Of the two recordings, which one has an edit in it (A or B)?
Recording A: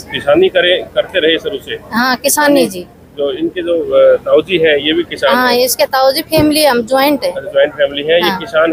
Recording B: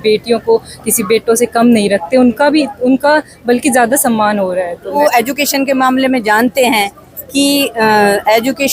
B